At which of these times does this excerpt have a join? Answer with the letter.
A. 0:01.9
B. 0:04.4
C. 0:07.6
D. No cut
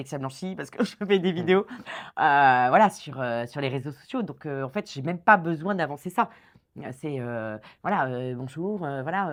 D